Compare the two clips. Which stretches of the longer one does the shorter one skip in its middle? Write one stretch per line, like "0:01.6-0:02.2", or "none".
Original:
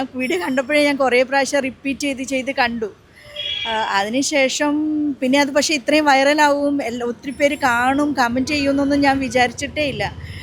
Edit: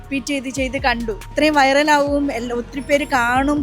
0:03.0-0:05.8